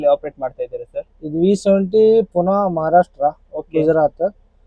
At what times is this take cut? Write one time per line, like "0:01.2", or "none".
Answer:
none